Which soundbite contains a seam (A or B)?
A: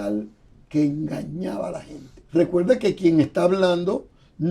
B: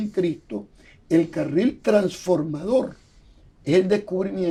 A